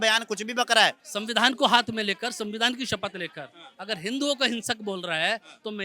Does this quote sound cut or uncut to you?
cut